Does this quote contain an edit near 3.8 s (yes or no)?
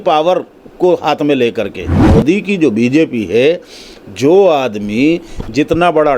no